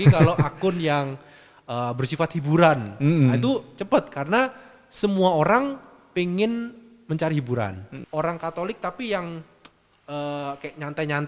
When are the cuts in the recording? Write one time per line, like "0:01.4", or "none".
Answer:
0:07.9

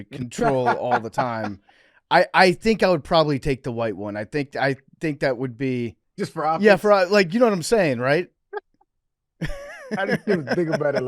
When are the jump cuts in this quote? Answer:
0:06.0
0:08.4

